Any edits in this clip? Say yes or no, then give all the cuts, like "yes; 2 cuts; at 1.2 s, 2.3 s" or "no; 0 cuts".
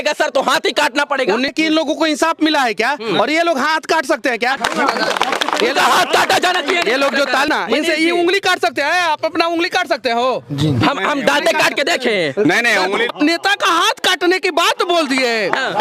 yes; 4 cuts; at 1.5 s, 4.6 s, 7.5 s, 13.1 s